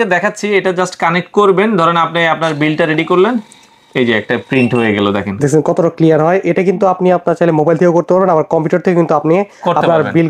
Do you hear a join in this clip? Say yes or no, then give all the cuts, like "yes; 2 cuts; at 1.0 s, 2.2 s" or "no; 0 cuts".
no; 0 cuts